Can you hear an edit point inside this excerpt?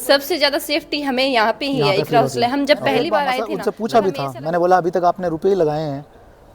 yes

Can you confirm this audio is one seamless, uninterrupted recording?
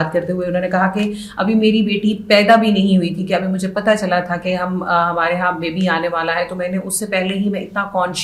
yes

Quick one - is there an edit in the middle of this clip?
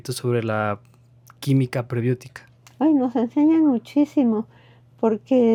no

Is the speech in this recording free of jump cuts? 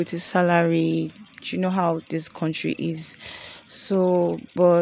yes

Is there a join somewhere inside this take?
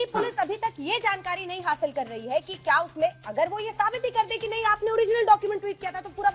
no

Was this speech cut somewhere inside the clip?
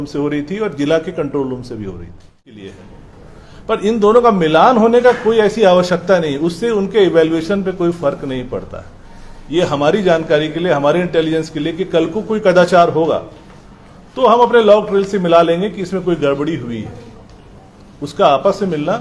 yes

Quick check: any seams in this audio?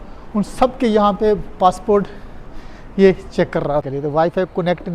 yes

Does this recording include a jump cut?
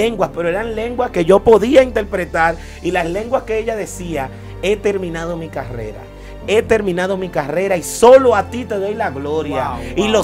no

